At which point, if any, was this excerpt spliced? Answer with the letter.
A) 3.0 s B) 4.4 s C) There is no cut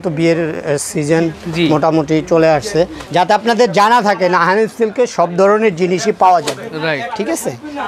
A